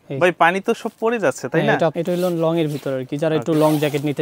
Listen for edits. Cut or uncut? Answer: cut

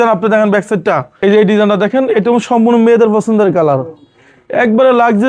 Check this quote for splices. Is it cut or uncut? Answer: cut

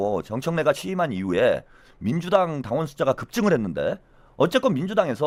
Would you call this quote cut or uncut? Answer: uncut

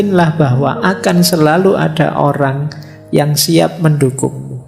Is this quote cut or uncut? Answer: uncut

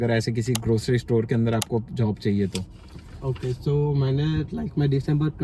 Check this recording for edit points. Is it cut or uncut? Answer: uncut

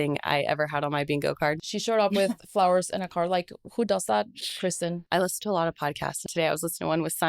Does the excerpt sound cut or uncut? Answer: cut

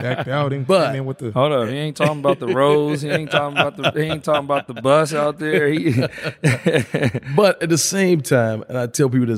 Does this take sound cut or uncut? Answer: uncut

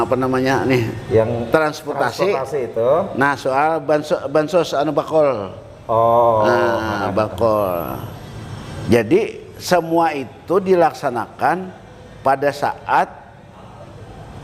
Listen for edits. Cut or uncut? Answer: uncut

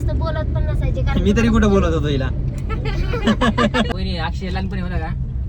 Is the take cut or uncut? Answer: cut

